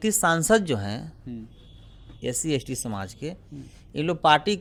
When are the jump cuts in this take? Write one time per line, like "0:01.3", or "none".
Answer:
none